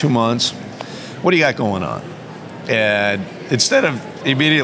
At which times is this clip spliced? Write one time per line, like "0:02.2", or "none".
none